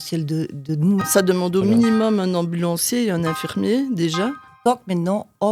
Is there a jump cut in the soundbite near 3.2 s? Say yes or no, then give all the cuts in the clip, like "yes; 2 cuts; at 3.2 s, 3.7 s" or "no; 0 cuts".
no; 2 cuts; at 1.1 s, 4.4 s